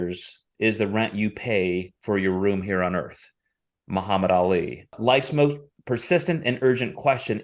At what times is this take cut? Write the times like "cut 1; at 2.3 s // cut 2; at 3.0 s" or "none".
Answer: cut 1; at 5.0 s